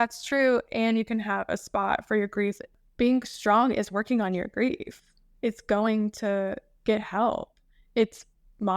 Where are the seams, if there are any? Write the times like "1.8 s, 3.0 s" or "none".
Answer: 2.8 s